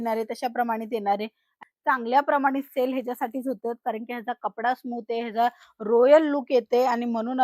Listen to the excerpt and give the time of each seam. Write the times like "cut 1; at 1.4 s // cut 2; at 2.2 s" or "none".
cut 1; at 1.6 s